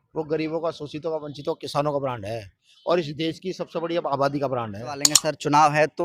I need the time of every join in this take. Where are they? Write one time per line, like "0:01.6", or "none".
0:05.1